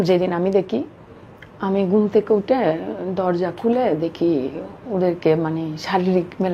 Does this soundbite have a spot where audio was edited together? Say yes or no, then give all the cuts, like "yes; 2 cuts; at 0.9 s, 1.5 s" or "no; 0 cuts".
no; 0 cuts